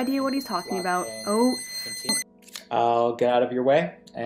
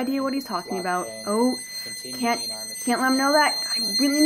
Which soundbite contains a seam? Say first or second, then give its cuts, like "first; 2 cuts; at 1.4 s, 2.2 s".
first; 1 cut; at 2.1 s